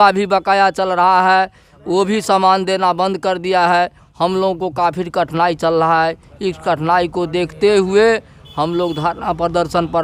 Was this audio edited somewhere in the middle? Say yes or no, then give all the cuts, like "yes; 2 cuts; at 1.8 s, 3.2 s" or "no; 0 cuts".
no; 0 cuts